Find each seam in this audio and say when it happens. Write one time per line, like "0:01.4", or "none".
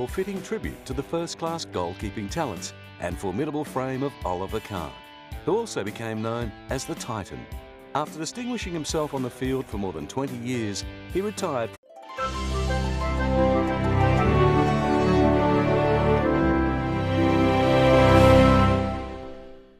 none